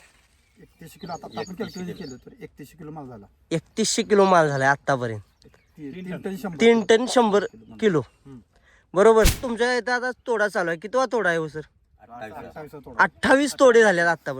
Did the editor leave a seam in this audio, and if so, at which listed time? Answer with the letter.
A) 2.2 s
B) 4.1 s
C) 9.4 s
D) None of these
C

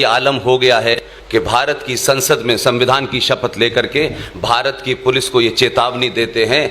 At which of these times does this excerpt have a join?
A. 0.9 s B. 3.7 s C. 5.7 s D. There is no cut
A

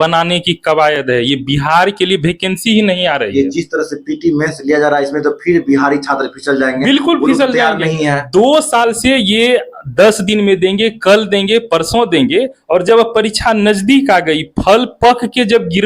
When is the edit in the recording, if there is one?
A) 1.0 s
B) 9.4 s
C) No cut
C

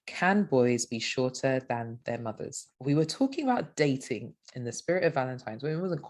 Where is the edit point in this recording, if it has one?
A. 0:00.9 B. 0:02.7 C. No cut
B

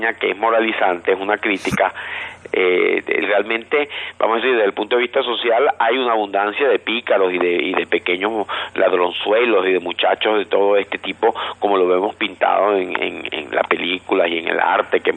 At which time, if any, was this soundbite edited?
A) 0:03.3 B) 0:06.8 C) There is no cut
C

